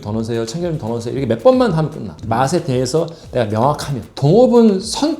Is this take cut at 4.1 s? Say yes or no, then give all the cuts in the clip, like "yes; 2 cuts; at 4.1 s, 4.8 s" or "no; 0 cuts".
yes; 1 cut; at 4.1 s